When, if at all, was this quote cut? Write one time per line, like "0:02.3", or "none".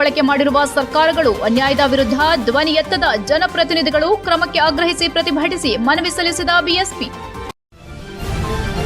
0:07.4